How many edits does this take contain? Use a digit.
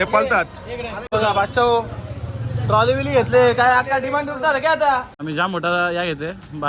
2